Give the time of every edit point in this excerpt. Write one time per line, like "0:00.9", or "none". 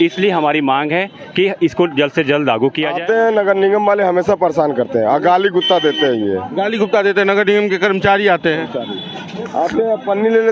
0:03.0